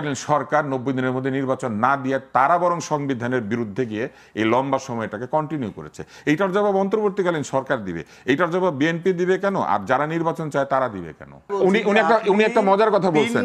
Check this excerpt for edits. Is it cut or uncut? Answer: cut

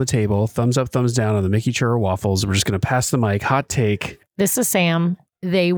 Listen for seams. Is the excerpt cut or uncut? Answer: uncut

